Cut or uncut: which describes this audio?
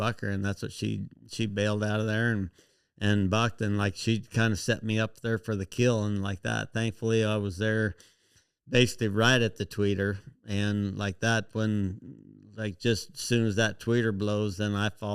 uncut